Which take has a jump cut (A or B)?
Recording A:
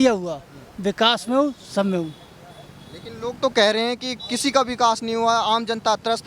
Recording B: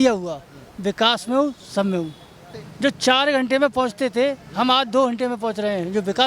B